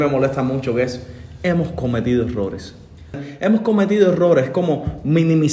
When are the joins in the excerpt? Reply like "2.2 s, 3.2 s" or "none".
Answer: 3.2 s